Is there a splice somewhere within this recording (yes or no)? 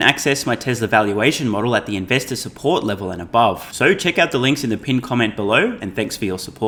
no